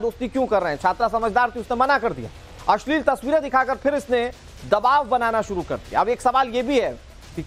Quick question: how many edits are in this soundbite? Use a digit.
0